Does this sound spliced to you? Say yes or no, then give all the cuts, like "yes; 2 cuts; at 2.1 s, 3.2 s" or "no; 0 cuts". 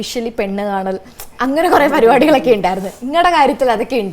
no; 0 cuts